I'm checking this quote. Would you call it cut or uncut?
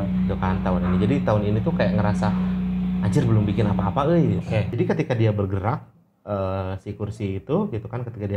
cut